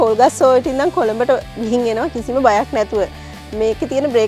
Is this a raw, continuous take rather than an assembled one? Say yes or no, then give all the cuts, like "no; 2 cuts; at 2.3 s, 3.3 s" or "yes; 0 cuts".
yes; 0 cuts